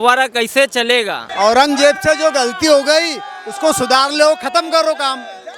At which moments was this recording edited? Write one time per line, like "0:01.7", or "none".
0:01.2